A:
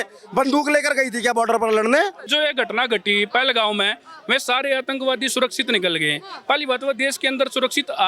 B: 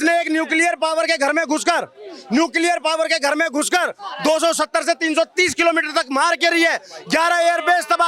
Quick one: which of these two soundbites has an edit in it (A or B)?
A